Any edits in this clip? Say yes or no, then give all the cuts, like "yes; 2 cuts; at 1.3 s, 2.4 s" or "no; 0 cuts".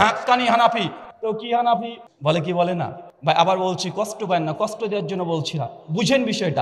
yes; 2 cuts; at 2.0 s, 3.1 s